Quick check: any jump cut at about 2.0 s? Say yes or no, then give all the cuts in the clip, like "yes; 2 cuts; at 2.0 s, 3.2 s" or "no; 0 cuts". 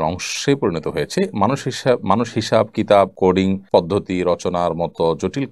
no; 1 cut; at 3.3 s